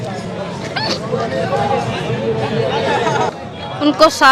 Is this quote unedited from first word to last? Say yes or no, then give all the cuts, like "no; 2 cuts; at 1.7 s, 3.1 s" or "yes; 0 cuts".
no; 1 cut; at 3.3 s